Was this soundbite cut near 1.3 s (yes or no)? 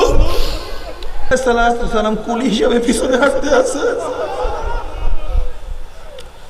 yes